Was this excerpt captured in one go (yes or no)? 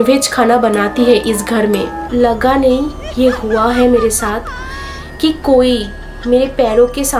no